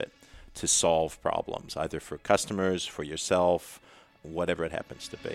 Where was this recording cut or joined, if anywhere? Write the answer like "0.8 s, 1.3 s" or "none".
4.1 s